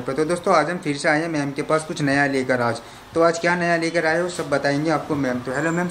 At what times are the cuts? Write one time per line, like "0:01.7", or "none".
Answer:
none